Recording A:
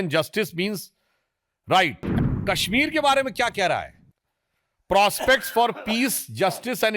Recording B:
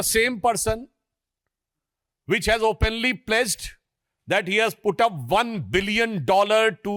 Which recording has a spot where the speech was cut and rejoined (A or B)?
A